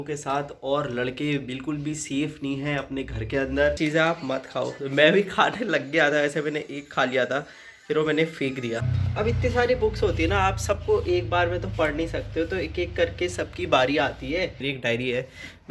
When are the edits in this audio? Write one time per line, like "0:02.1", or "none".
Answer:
0:03.8
0:09.0
0:14.6

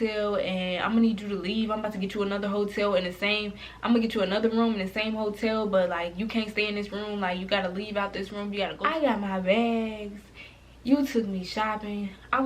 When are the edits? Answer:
0:08.8

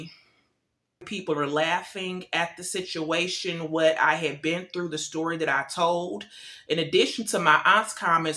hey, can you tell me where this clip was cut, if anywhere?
0:01.1

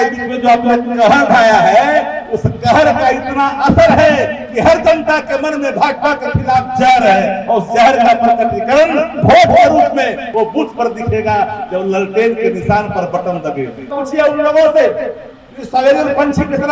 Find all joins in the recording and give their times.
0:10.2
0:14.0

